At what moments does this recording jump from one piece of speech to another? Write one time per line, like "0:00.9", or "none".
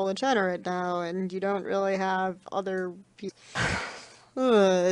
none